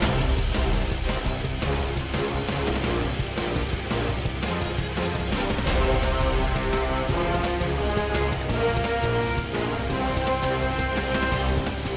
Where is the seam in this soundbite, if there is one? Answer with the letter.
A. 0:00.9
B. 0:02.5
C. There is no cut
C